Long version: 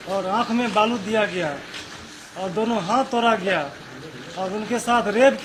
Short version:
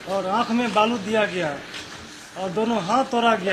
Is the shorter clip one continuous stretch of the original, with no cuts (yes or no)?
yes